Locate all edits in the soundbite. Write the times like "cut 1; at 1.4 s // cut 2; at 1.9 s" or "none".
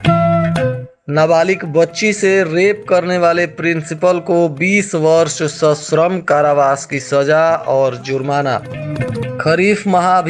cut 1; at 1.0 s